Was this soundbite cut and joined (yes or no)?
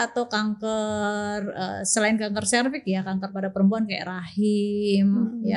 no